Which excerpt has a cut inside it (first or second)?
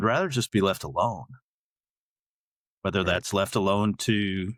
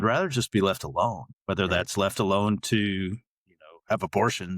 second